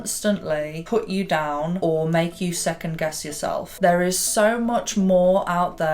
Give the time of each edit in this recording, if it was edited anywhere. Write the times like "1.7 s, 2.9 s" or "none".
1.8 s, 3.8 s